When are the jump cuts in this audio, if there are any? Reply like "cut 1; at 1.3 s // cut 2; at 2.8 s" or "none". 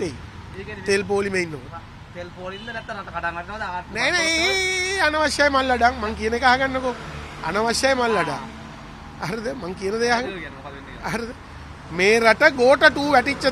none